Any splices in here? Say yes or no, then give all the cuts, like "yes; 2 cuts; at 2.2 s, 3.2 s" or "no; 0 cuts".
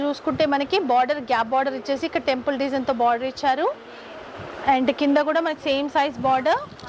no; 0 cuts